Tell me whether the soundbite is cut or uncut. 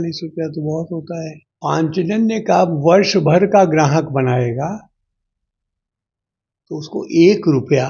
cut